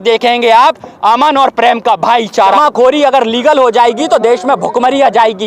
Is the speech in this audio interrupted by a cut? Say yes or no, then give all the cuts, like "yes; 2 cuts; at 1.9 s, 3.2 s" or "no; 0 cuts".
yes; 1 cut; at 2.6 s